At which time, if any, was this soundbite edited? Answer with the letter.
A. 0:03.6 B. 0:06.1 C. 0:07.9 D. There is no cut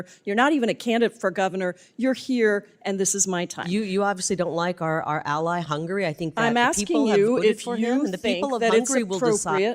A